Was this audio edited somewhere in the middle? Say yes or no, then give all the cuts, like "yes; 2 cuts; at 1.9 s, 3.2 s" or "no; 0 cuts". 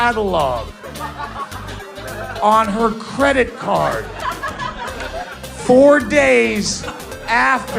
yes; 1 cut; at 1.9 s